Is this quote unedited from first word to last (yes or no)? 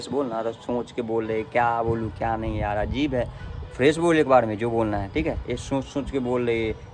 yes